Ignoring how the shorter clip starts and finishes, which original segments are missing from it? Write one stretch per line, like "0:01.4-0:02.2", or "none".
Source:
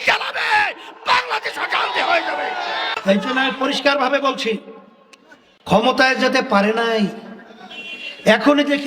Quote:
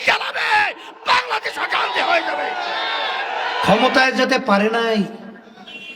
0:03.0-0:05.0